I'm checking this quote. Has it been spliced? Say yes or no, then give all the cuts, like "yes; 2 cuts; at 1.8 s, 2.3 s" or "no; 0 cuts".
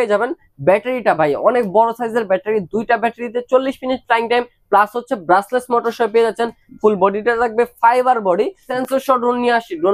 yes; 1 cut; at 8.7 s